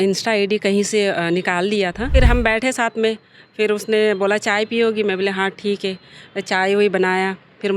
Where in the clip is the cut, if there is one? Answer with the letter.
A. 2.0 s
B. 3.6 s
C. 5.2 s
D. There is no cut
A